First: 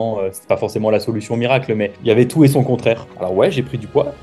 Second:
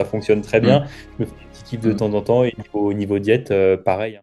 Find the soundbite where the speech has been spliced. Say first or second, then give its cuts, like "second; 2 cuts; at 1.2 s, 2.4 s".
first; 1 cut; at 3.1 s